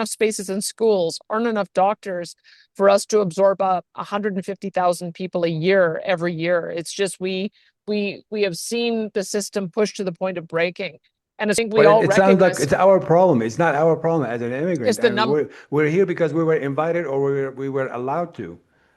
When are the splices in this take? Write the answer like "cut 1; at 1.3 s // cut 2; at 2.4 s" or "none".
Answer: cut 1; at 11.6 s